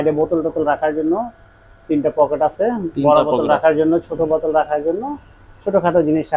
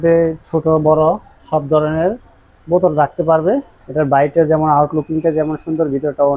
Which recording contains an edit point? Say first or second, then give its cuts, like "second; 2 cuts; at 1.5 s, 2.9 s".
second; 1 cut; at 3.8 s